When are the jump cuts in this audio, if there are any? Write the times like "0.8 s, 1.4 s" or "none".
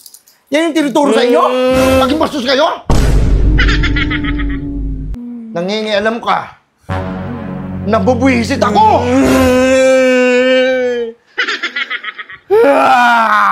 5.2 s